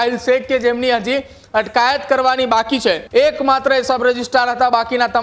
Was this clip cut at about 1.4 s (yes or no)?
no